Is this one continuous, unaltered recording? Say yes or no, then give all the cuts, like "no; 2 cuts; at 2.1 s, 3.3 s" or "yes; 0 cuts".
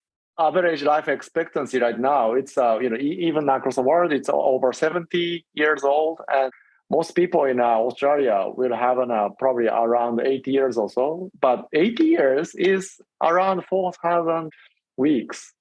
no; 2 cuts; at 6.5 s, 14.5 s